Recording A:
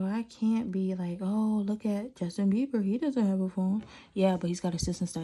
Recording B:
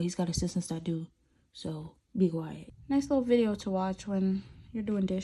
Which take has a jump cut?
B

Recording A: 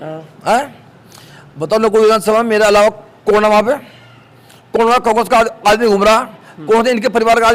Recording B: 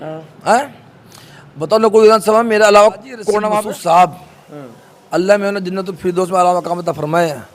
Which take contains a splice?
B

